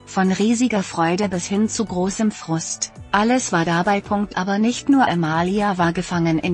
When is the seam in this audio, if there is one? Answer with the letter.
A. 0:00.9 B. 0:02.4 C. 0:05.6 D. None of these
D